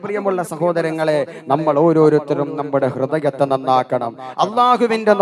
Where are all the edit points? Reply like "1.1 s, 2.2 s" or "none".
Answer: none